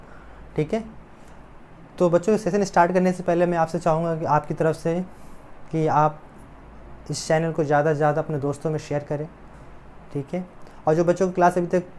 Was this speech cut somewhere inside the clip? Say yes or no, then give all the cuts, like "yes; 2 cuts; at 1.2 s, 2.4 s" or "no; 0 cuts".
no; 0 cuts